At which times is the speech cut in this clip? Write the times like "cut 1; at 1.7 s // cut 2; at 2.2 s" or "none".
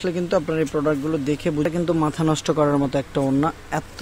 cut 1; at 1.7 s